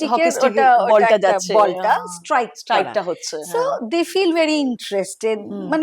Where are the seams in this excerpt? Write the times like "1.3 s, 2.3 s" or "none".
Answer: none